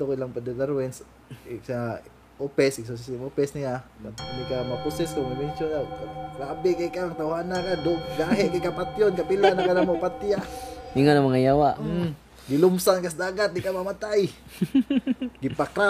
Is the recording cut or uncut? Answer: cut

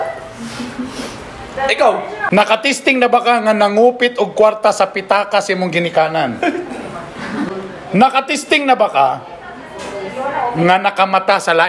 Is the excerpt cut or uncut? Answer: cut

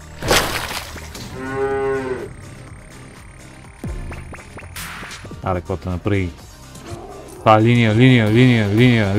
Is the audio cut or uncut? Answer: cut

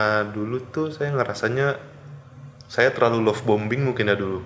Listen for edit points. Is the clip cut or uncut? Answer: uncut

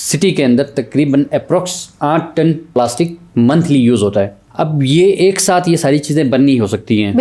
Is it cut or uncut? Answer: cut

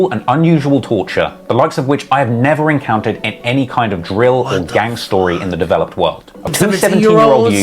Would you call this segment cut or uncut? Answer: cut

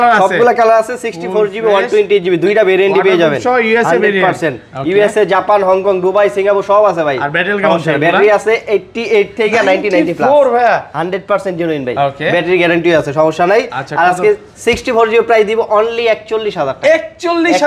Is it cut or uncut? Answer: uncut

